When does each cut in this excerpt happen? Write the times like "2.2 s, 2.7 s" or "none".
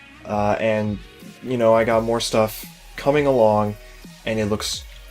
3.4 s

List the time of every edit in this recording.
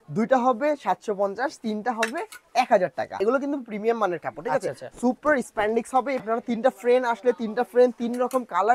3.2 s, 6.2 s

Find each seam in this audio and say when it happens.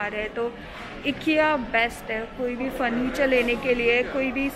none

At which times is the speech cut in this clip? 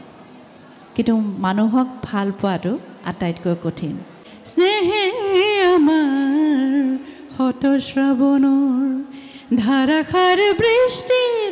4.3 s

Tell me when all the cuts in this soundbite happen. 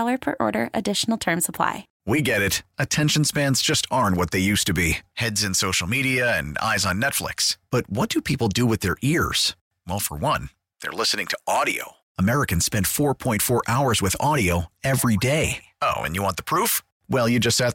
1.9 s

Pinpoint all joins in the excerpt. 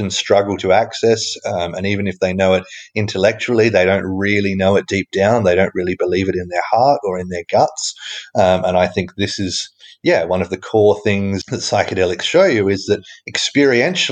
11.4 s

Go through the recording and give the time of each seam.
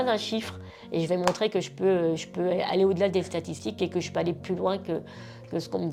none

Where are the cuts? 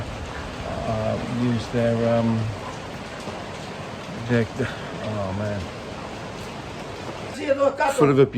7.4 s

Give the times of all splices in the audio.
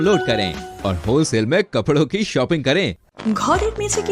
3.1 s

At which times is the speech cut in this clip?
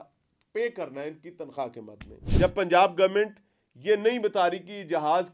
2.2 s

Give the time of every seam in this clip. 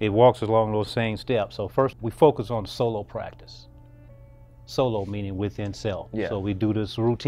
2.0 s

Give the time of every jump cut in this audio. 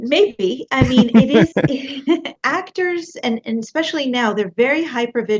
2.4 s

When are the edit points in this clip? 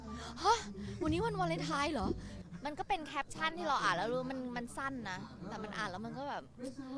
2.3 s

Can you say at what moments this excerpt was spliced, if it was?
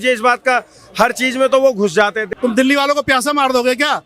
2.2 s

